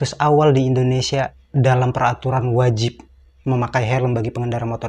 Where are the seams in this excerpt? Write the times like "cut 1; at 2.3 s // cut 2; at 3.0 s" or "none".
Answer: cut 1; at 1.4 s

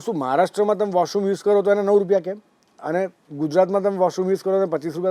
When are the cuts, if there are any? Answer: none

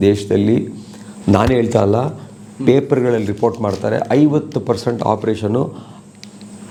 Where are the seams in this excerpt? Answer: none

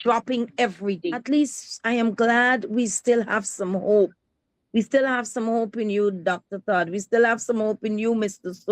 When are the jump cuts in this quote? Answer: cut 1; at 1.2 s

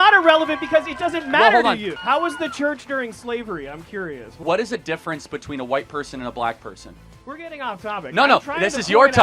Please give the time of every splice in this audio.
cut 1; at 1.9 s // cut 2; at 4.4 s

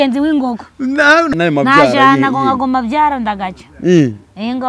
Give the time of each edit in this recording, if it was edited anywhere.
cut 1; at 1.3 s

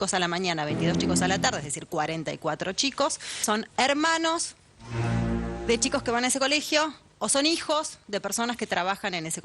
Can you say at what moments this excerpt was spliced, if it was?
cut 1; at 3.4 s

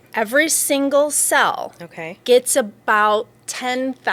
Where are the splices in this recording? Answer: none

